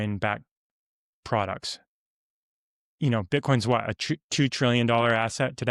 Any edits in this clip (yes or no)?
no